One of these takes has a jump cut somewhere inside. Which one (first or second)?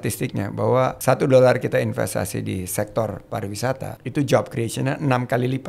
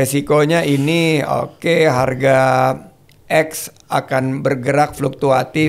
first